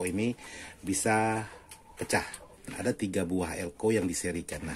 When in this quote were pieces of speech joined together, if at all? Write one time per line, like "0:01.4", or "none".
0:02.7